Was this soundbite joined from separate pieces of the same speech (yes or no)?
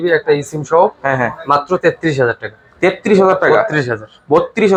no